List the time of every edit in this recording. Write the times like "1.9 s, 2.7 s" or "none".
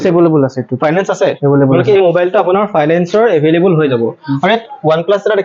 none